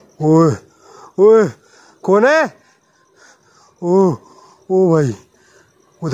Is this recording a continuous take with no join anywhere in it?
yes; 0 cuts

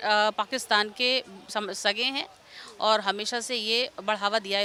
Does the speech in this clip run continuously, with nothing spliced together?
yes; 0 cuts

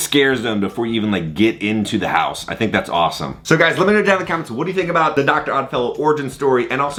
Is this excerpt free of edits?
yes; 0 cuts

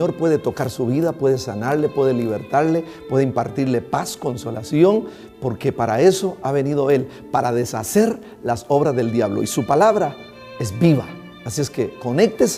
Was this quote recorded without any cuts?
yes; 0 cuts

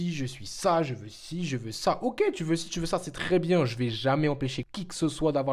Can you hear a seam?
no; 0 cuts

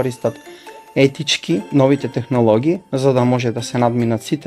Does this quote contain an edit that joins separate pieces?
yes; 1 cut; at 1.6 s

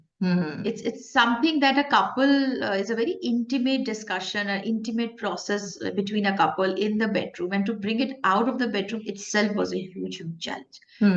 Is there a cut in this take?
no; 0 cuts

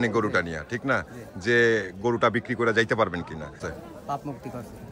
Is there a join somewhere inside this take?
yes; 1 cut; at 3.7 s

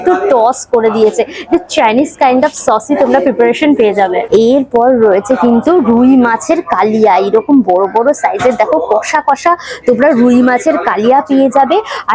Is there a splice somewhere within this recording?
no; 0 cuts

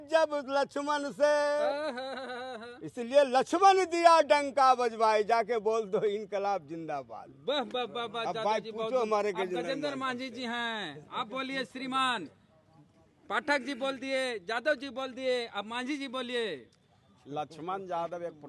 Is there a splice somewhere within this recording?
no; 0 cuts

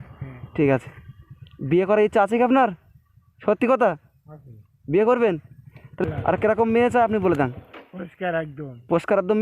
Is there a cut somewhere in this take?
yes; 1 cut; at 6.0 s

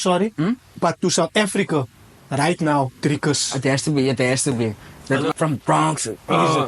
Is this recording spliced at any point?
yes; 1 cut; at 5.3 s

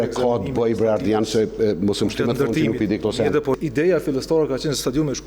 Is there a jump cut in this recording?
yes; 1 cut; at 3.6 s

